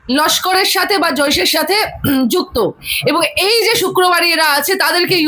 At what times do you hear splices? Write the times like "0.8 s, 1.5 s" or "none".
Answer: 2.9 s